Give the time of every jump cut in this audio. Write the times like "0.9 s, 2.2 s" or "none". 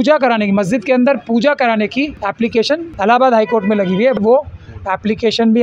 2.5 s, 4.2 s